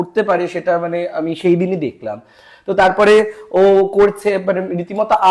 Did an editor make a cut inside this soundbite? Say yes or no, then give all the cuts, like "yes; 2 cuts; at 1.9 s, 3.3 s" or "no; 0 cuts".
no; 0 cuts